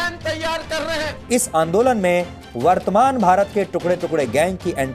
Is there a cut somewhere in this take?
yes; 1 cut; at 1.2 s

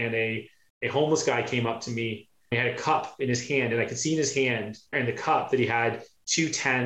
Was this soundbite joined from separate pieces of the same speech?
no; 0 cuts

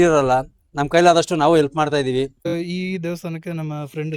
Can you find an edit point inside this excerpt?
yes; 1 cut; at 2.5 s

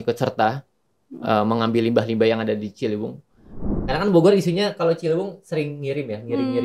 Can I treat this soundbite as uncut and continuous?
no; 1 cut; at 3.7 s

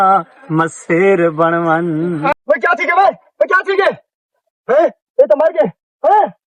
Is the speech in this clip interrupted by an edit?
yes; 1 cut; at 2.3 s

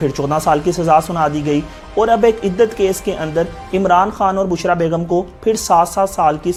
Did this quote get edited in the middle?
no; 0 cuts

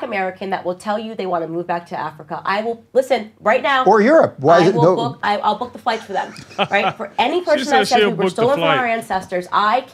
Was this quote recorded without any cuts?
no; 1 cut; at 6.9 s

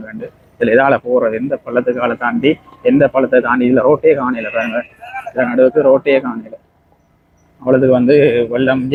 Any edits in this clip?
no; 0 cuts

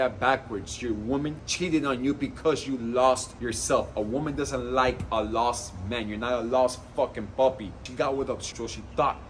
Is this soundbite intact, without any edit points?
no; 3 cuts; at 1.4 s, 3.3 s, 8.2 s

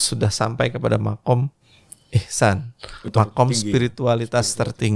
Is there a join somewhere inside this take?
yes; 1 cut; at 3.1 s

